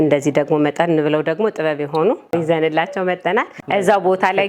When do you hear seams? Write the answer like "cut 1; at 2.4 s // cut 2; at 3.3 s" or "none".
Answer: cut 1; at 2.3 s // cut 2; at 3.6 s